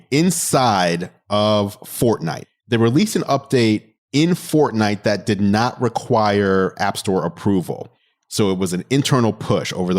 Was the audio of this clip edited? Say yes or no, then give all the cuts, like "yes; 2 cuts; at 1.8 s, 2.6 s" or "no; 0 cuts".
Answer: yes; 2 cuts; at 2.4 s, 4.0 s